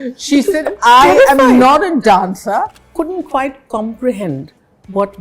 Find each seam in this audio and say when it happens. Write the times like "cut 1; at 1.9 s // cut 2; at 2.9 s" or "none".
cut 1; at 2.8 s